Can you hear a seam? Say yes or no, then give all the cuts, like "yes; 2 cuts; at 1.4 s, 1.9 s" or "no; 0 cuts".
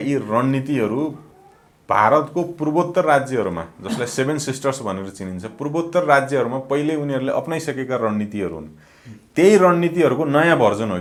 no; 0 cuts